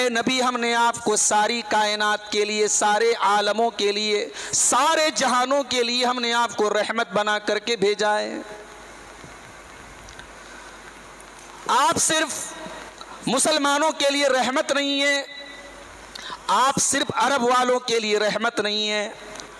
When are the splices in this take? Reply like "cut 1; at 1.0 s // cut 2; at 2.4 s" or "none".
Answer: none